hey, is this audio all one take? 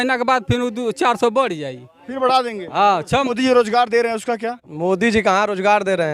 no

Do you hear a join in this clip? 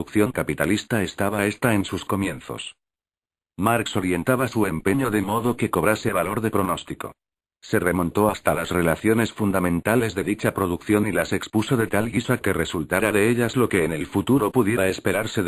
yes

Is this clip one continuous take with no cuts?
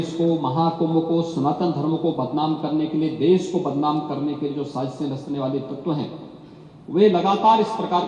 yes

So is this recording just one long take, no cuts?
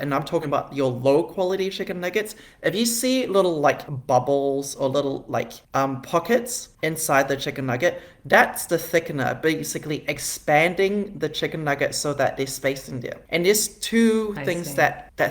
no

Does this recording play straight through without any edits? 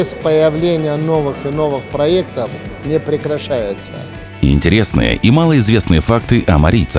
no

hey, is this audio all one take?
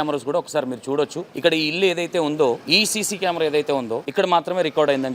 no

